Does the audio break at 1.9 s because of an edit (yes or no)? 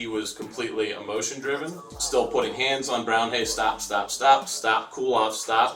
yes